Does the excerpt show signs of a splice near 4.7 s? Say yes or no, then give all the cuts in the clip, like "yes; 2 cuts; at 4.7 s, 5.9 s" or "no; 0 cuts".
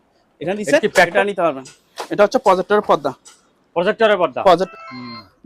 yes; 2 cuts; at 1.1 s, 4.7 s